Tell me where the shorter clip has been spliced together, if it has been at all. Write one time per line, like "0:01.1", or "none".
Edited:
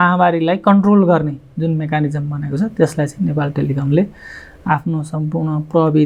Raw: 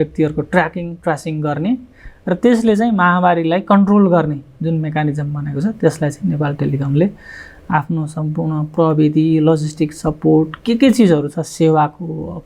none